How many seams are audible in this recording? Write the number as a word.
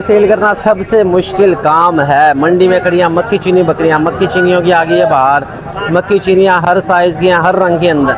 zero